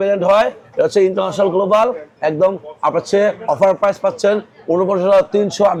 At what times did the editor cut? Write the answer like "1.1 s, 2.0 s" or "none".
none